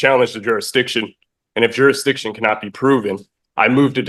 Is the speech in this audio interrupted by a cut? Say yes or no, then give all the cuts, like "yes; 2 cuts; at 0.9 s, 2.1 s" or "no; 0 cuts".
no; 0 cuts